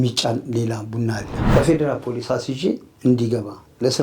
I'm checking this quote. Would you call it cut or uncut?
cut